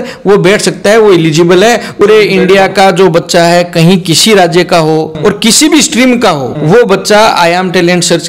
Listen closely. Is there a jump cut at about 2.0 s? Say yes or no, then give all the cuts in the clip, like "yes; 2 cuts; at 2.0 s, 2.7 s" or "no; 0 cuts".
yes; 3 cuts; at 2.0 s, 5.1 s, 6.5 s